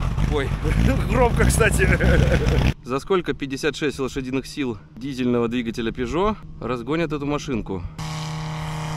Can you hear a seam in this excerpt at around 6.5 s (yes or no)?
yes